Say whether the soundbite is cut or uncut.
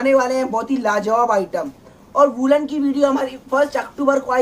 uncut